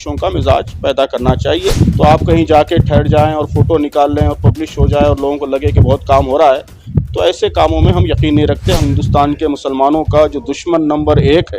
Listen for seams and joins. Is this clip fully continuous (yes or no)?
no